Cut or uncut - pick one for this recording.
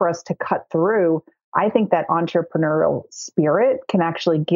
uncut